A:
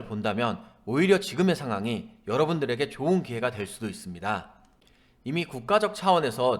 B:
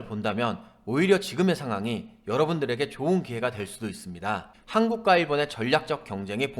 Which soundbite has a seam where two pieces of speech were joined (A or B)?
B